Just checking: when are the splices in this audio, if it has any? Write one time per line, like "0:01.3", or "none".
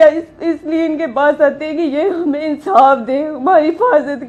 none